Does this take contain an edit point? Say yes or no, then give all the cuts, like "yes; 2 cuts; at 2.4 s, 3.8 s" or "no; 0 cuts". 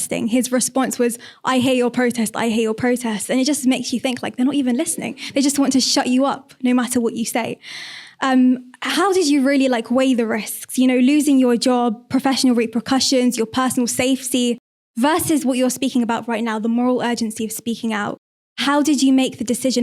no; 0 cuts